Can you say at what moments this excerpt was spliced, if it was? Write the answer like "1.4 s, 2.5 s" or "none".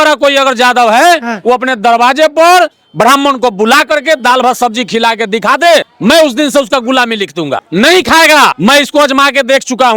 5.9 s, 7.6 s, 8.6 s